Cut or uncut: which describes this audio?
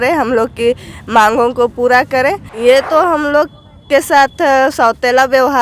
cut